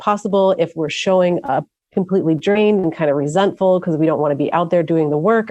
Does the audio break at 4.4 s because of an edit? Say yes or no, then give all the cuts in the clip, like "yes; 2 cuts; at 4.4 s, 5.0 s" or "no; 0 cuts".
no; 1 cut; at 1.8 s